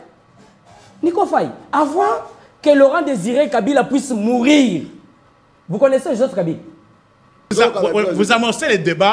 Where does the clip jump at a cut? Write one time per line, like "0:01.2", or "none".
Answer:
0:07.5